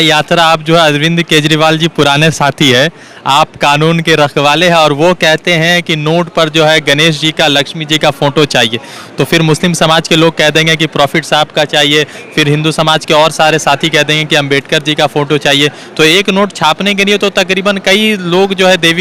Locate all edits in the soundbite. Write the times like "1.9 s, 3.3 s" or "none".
none